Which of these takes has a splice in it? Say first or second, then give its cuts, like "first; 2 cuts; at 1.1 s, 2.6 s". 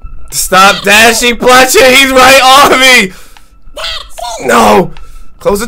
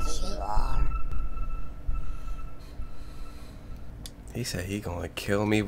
second; 1 cut; at 1.1 s